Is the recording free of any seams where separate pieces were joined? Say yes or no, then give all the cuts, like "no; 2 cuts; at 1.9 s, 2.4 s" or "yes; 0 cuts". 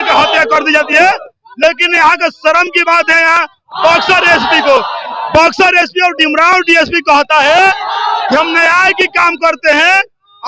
yes; 0 cuts